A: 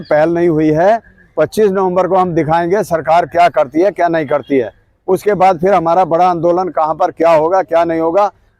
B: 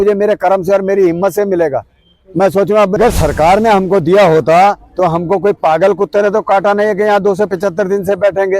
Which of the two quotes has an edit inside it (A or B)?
B